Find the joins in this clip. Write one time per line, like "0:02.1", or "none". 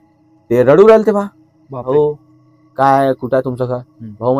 0:01.8